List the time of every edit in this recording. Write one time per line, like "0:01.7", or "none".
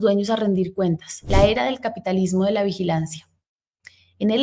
0:01.1